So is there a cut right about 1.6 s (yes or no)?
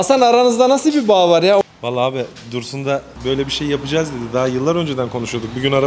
yes